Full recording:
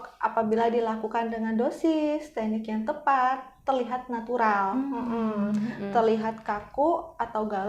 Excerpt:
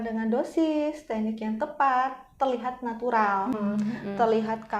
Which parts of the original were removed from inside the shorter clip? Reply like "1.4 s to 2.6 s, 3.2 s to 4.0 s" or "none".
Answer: 4.8 s to 5.3 s